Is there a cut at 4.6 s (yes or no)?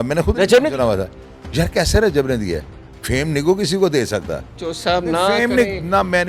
yes